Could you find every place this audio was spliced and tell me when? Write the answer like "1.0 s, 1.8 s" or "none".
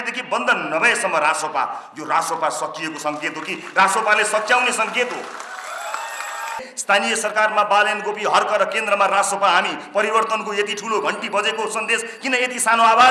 6.6 s